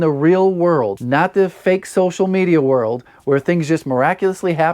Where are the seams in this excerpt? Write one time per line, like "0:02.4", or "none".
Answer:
0:01.0